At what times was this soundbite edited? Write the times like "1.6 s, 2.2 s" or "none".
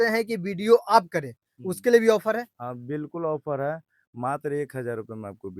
none